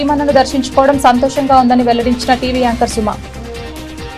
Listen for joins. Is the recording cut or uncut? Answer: cut